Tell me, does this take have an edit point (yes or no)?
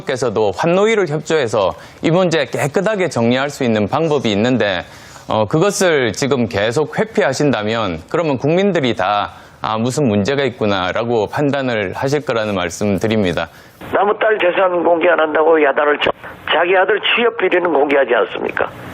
yes